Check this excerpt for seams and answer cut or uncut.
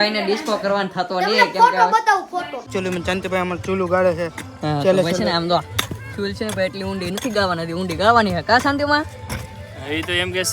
cut